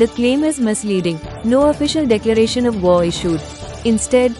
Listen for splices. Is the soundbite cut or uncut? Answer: cut